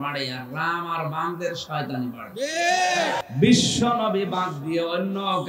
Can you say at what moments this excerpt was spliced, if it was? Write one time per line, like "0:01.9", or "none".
0:03.2